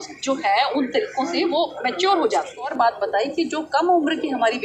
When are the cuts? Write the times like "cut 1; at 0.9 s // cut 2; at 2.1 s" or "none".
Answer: cut 1; at 2.7 s